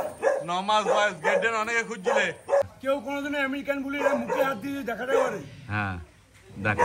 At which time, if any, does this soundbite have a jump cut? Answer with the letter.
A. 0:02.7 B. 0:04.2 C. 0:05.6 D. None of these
A